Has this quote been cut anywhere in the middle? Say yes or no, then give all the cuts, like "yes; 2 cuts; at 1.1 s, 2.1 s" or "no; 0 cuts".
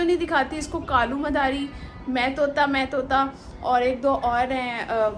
no; 0 cuts